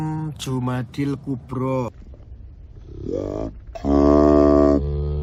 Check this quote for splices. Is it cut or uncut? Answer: uncut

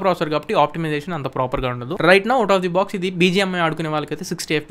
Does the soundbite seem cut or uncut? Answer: uncut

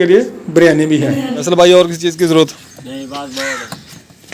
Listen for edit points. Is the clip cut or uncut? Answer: cut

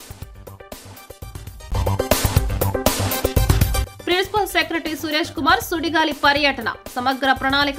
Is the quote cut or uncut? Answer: cut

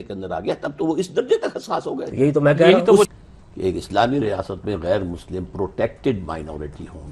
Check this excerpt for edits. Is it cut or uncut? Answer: cut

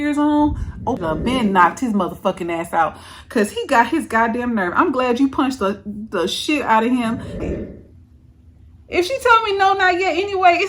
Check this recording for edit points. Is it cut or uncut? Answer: cut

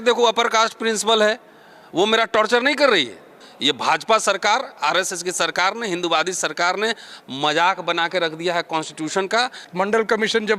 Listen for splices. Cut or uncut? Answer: cut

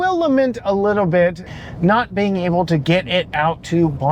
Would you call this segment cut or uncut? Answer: cut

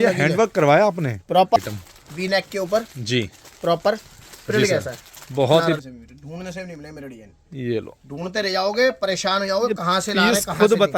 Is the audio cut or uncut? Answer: cut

